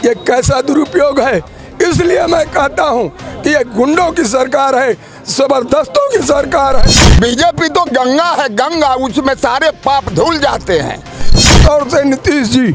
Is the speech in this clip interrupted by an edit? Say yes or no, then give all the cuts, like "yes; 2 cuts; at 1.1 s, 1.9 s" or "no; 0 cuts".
yes; 2 cuts; at 7.0 s, 11.5 s